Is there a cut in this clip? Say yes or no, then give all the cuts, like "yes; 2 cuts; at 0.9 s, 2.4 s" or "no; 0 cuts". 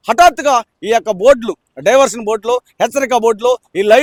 no; 0 cuts